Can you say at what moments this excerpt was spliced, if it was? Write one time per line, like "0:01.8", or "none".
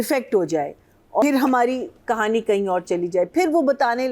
0:01.2